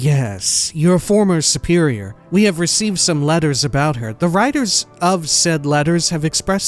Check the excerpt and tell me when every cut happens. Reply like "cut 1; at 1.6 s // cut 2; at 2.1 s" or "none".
cut 1; at 2.1 s